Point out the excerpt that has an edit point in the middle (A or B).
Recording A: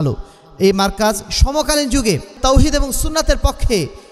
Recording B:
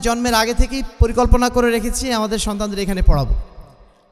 A